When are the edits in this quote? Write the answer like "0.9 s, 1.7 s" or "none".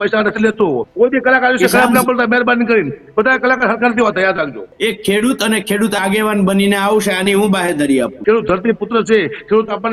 0.9 s, 4.7 s, 8.2 s